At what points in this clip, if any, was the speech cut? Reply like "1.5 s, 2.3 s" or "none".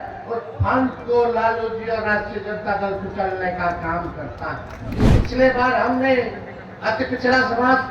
5.0 s